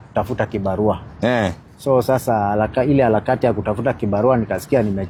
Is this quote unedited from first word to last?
yes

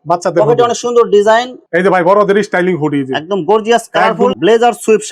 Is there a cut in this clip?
yes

